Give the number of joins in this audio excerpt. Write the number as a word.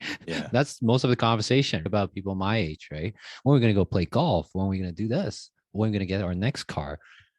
one